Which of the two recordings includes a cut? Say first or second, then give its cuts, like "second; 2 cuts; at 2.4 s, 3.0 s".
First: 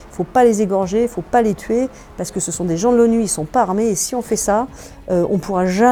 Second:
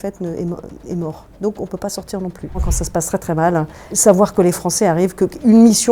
second; 2 cuts; at 2.7 s, 3.9 s